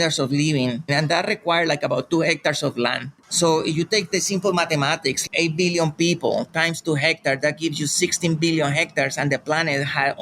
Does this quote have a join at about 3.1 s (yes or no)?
yes